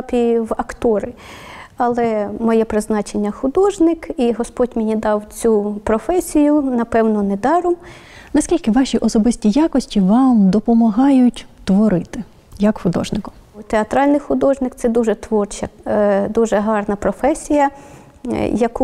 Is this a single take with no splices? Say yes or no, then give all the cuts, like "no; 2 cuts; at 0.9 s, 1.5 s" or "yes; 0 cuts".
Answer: yes; 0 cuts